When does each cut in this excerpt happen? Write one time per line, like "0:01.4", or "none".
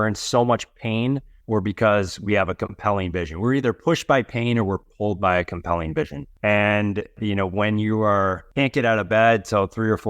0:01.3
0:06.2
0:07.2
0:08.4